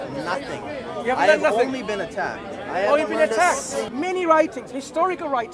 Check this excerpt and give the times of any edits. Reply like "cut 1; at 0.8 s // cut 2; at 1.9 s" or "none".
cut 1; at 3.9 s